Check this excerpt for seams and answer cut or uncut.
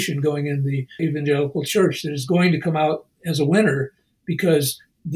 cut